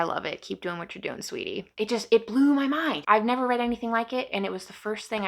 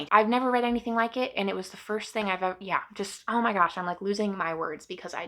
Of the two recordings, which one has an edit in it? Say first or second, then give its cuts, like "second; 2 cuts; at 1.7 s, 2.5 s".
first; 1 cut; at 1.6 s